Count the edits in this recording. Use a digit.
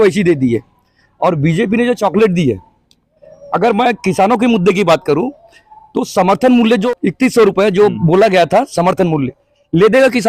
1